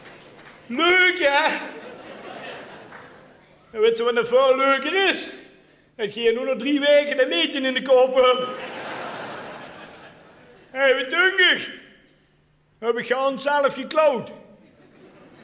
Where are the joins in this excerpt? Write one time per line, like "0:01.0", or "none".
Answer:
0:12.8